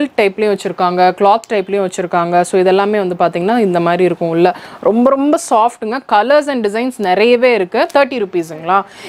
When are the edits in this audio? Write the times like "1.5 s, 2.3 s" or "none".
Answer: 7.9 s